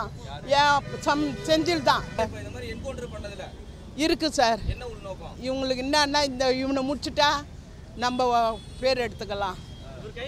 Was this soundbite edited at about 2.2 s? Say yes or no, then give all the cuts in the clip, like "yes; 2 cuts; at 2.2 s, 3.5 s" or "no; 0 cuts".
yes; 1 cut; at 2.2 s